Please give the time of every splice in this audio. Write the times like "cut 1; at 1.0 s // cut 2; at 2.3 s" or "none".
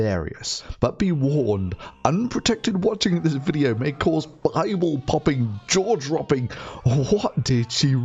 cut 1; at 6.9 s